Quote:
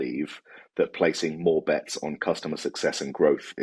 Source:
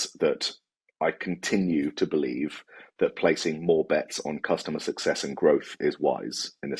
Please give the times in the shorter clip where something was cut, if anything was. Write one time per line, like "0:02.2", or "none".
none